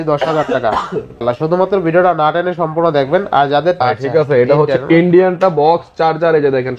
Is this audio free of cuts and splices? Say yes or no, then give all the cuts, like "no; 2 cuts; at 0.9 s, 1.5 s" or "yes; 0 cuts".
no; 2 cuts; at 1.2 s, 3.8 s